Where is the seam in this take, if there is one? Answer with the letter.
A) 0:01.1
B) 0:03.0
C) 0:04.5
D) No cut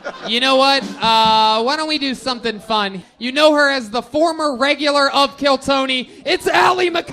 B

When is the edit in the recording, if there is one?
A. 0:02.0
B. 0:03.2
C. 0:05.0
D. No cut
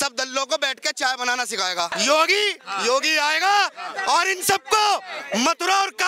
A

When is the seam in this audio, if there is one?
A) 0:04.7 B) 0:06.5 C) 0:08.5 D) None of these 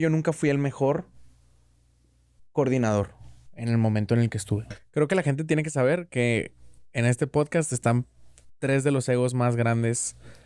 A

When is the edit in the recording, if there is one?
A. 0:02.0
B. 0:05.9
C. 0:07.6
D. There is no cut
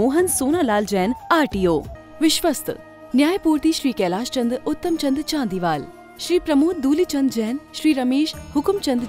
A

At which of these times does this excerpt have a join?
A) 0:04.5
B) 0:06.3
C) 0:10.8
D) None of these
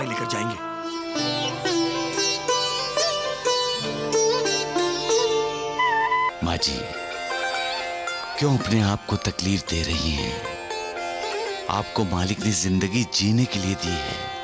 B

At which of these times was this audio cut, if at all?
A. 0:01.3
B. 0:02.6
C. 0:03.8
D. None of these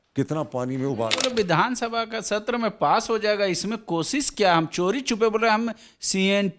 A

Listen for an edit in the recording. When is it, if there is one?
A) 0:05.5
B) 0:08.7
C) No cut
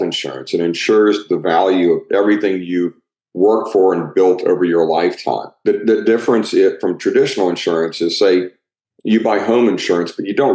A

